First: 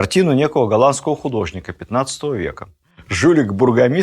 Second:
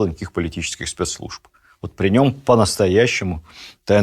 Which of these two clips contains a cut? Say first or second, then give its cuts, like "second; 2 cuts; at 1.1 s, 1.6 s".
first; 1 cut; at 3.1 s